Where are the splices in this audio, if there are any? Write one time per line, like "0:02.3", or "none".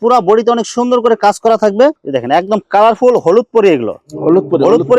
0:02.0